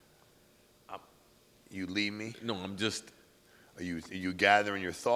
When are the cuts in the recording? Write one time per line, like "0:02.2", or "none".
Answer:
none

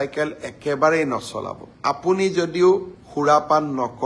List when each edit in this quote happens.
none

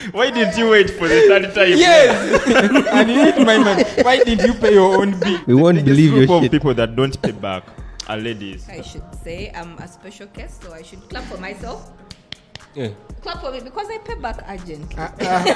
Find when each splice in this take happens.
0:05.4
0:08.7

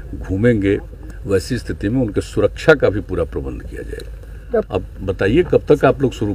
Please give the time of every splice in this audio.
0:01.0
0:04.7

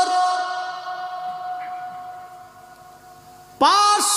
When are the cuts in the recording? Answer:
none

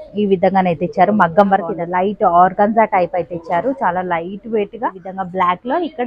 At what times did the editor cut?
0:01.7
0:05.1

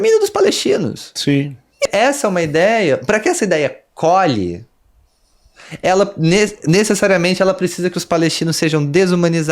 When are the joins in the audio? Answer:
0:01.9

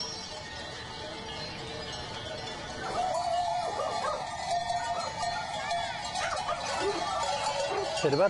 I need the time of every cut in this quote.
none

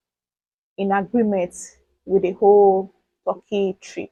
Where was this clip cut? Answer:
none

